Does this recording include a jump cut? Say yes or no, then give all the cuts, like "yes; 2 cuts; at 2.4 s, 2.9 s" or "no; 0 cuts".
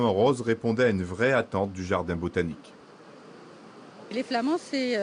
no; 0 cuts